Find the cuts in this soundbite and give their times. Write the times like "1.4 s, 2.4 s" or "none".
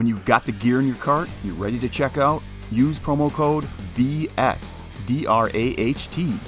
none